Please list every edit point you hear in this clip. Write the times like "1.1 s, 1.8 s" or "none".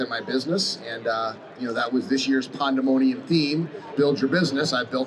3.9 s

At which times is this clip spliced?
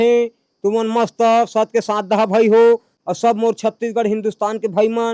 2.9 s

